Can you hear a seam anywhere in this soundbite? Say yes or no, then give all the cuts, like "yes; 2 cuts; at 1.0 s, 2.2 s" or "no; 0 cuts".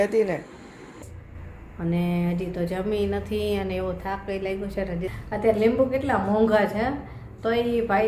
yes; 2 cuts; at 1.0 s, 5.1 s